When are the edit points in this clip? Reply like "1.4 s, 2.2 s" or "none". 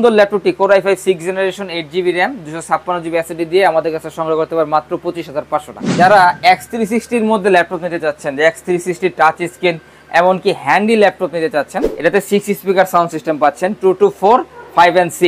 5.8 s, 11.8 s